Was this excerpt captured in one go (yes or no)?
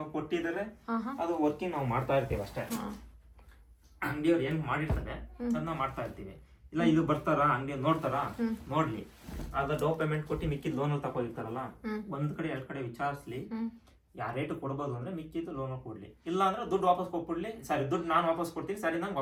yes